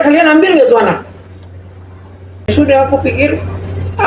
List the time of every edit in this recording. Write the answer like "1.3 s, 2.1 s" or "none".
2.5 s